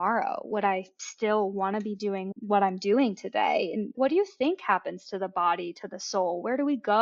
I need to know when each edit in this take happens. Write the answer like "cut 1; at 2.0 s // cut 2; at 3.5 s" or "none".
cut 1; at 2.3 s // cut 2; at 3.9 s